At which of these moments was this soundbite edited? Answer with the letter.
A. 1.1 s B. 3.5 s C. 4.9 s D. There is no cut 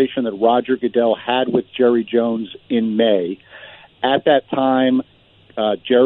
D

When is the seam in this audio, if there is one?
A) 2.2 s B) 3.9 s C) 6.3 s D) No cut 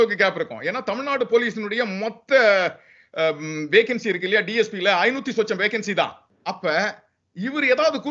C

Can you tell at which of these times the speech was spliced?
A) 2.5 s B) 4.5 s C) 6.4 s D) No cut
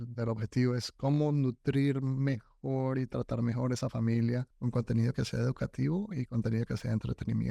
B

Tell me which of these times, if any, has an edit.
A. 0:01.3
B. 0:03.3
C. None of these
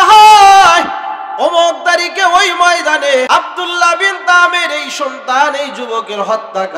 B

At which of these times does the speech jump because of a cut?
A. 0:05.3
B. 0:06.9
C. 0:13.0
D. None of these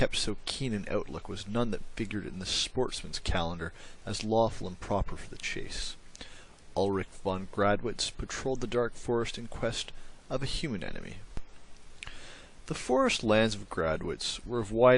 A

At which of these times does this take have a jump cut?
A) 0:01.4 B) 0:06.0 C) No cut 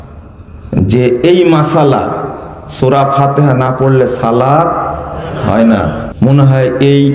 B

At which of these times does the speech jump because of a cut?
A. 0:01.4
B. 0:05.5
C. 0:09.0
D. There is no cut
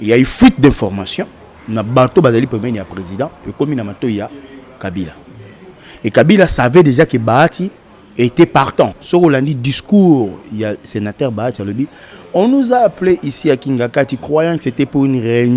C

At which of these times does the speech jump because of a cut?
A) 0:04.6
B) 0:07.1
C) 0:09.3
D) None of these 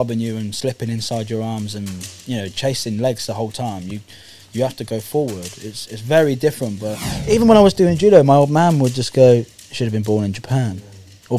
B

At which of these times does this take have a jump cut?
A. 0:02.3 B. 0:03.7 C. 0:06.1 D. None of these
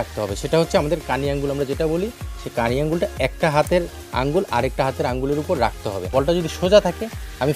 C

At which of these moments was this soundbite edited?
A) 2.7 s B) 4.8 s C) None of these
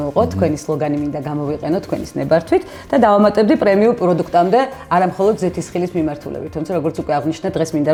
C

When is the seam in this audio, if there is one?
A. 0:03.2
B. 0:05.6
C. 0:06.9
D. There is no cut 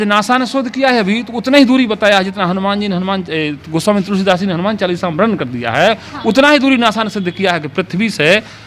D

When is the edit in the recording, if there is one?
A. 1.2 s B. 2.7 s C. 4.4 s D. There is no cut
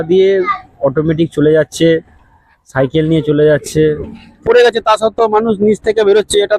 C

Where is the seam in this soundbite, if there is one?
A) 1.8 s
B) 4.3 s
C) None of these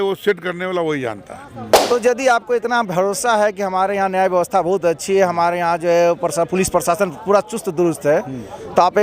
A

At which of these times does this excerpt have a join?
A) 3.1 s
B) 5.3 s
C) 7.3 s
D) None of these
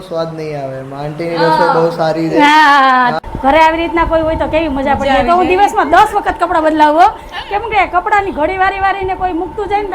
A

